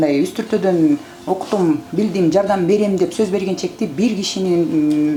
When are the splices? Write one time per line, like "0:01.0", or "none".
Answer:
none